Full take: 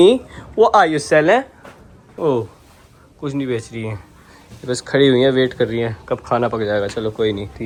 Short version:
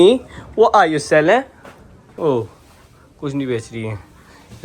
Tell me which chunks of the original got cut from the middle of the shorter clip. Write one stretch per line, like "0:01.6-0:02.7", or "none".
none